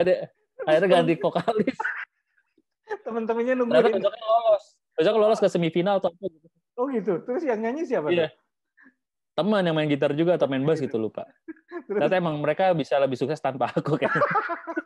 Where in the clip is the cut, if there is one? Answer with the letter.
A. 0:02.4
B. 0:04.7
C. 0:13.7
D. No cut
D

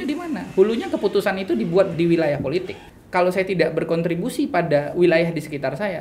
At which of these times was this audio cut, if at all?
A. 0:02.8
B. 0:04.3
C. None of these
A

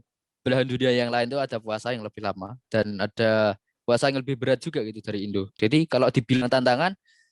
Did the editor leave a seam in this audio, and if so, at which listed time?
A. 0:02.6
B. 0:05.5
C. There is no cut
B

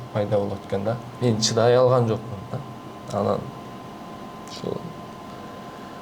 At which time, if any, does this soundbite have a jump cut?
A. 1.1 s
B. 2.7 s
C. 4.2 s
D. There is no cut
A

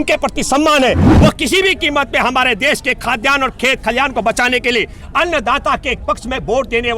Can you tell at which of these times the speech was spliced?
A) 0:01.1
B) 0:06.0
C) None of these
A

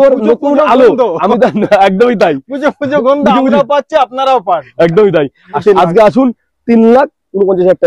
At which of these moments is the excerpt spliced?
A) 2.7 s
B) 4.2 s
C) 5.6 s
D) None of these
C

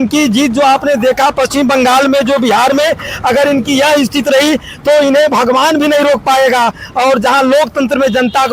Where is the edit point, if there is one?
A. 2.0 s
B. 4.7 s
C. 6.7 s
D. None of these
D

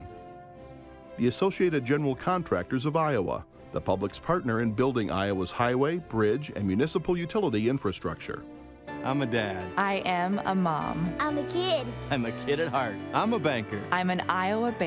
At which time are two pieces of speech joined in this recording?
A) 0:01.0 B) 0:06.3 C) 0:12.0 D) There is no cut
D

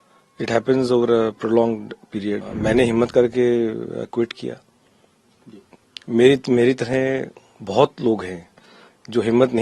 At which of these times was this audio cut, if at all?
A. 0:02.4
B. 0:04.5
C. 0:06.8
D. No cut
A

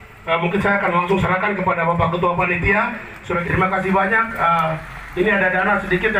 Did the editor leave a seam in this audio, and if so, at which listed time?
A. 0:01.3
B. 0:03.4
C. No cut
B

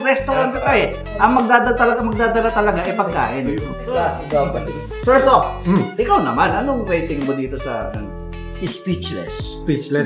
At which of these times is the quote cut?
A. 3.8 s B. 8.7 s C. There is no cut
A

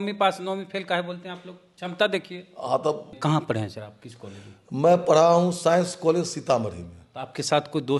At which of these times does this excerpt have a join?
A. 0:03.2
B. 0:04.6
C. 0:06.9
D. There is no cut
A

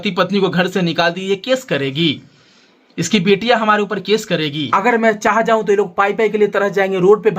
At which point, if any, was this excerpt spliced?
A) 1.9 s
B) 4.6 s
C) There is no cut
B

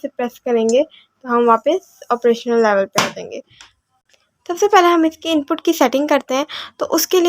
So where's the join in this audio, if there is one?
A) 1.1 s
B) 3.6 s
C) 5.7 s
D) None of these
B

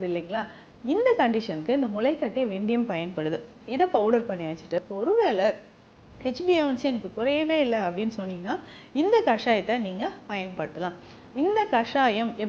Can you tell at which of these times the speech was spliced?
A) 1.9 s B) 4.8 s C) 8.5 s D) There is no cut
B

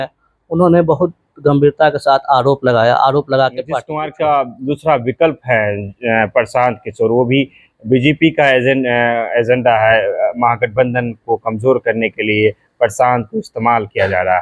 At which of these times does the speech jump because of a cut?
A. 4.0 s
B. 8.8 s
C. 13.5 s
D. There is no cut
A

